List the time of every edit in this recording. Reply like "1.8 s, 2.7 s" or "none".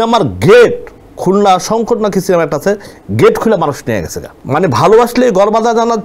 none